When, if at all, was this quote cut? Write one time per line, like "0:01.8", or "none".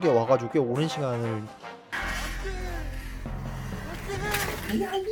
none